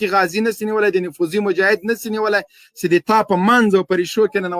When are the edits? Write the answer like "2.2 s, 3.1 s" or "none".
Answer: none